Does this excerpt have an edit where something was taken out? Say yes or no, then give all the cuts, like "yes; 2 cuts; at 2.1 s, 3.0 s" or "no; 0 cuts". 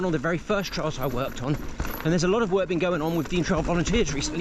no; 0 cuts